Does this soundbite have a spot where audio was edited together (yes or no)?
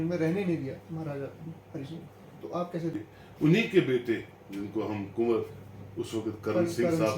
yes